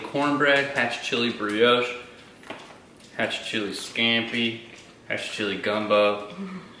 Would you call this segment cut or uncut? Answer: uncut